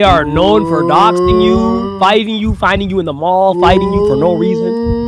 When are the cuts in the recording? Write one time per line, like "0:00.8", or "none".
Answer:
none